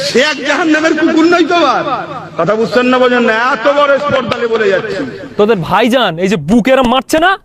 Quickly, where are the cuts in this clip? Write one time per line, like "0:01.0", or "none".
0:05.2